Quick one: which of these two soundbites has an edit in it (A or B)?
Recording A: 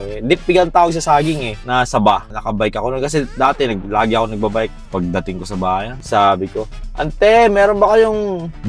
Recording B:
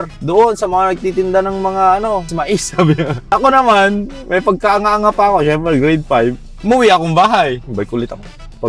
A